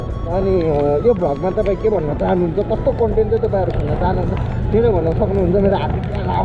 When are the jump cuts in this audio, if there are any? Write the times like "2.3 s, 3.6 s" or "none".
none